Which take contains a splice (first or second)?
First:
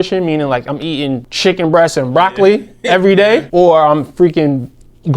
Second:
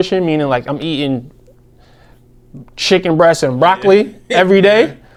first